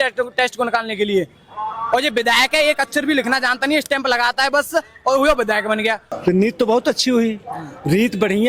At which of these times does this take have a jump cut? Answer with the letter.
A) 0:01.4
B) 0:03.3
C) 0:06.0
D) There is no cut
C